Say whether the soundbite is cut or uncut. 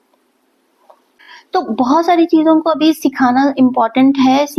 uncut